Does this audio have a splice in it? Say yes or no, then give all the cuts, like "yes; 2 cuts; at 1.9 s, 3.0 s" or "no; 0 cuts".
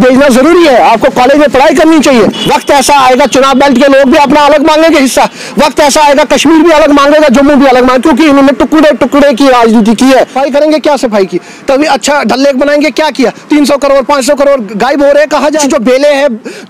yes; 3 cuts; at 2.4 s, 10.4 s, 15.6 s